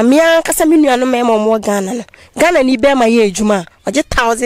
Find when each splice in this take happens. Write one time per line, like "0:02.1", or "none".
none